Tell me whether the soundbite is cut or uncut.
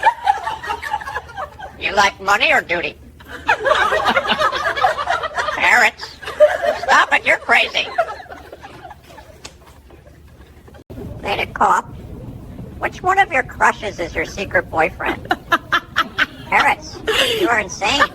cut